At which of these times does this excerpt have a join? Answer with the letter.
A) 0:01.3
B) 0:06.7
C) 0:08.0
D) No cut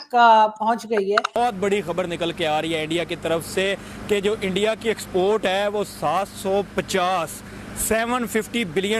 A